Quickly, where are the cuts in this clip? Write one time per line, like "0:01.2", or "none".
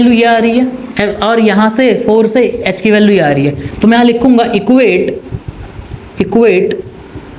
none